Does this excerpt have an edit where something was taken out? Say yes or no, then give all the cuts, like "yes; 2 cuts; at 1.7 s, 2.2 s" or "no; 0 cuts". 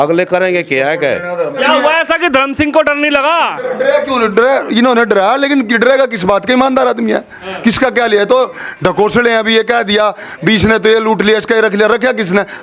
yes; 1 cut; at 1.6 s